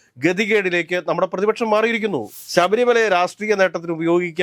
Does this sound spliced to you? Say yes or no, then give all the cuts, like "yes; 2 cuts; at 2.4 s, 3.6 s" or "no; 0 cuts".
yes; 1 cut; at 2.4 s